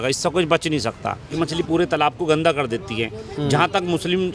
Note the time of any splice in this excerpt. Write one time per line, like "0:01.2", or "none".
0:01.3